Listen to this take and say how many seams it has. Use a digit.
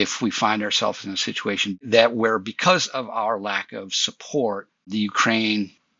1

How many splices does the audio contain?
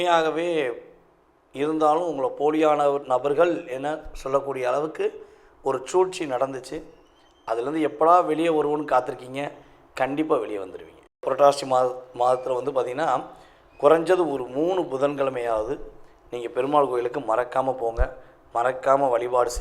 1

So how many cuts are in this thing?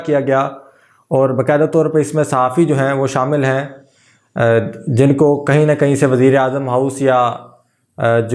0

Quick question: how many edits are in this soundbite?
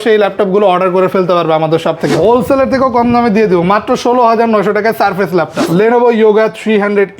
2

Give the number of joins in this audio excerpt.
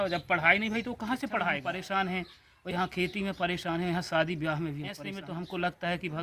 2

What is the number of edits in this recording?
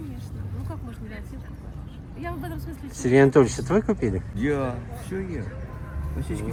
0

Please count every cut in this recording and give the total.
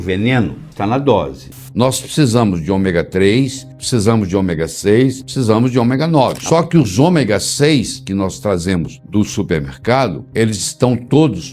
2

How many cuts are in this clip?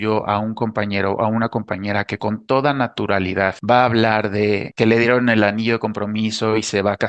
2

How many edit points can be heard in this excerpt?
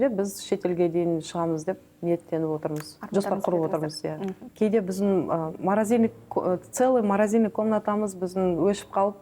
1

